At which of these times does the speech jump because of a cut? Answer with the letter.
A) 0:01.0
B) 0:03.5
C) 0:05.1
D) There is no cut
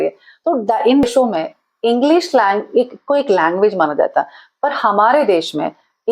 A